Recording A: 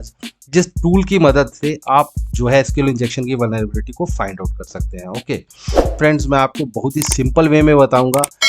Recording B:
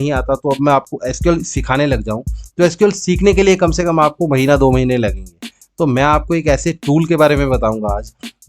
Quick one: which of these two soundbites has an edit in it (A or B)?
A